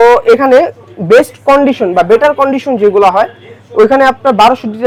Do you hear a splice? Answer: no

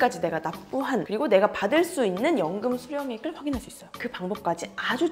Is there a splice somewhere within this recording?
yes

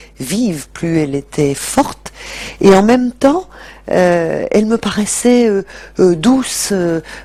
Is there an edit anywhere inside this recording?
no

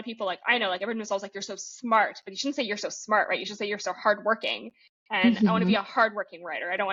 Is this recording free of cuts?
yes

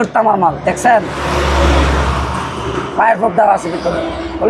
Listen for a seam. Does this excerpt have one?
no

